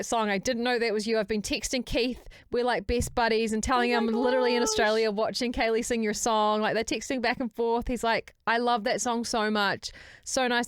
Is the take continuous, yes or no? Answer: yes